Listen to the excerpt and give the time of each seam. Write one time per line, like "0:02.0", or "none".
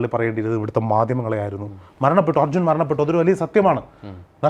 none